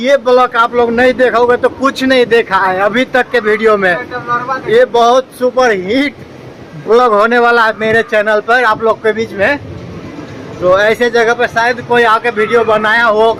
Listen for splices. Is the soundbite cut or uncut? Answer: uncut